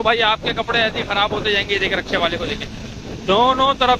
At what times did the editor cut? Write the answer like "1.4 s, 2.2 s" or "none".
none